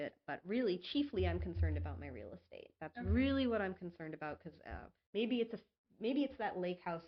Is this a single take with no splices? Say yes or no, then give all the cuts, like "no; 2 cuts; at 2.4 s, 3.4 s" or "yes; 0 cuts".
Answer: yes; 0 cuts